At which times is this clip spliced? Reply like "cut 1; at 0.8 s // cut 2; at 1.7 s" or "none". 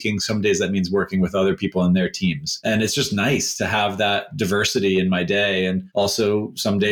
cut 1; at 2.5 s // cut 2; at 5.8 s